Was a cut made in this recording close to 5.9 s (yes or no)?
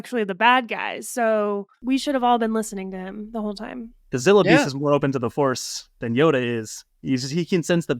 no